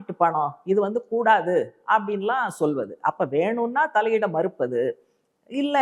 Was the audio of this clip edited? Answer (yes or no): no